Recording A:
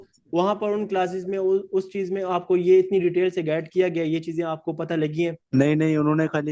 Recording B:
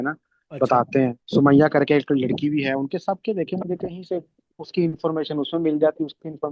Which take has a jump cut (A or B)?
B